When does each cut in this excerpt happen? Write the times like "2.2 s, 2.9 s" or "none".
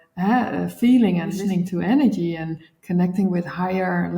1.4 s